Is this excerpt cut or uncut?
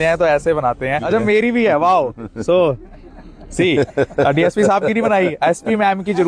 cut